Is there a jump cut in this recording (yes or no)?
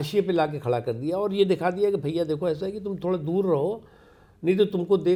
no